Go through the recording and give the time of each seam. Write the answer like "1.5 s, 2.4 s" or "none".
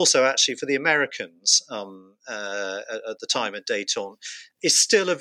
none